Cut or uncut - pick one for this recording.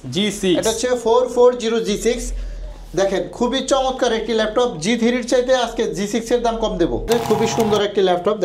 cut